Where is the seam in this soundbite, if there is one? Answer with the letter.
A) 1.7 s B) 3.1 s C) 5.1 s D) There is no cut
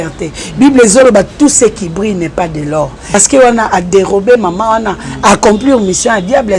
B